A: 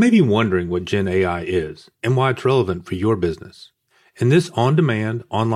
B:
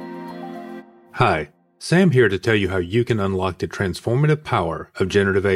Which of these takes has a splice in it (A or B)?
B